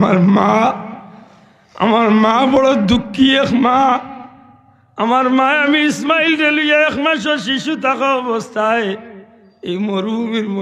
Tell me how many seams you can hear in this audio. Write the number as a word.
zero